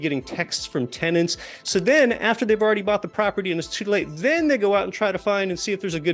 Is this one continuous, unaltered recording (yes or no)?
yes